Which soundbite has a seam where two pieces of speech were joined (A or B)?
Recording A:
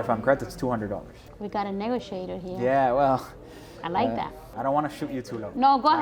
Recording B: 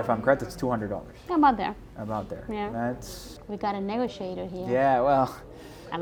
A